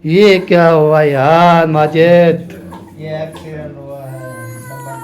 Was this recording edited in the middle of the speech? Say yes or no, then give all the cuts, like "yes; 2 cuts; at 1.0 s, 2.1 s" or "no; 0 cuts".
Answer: yes; 1 cut; at 2.8 s